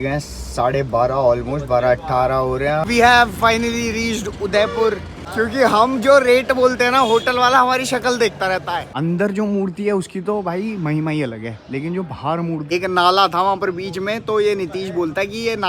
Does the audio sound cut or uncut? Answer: cut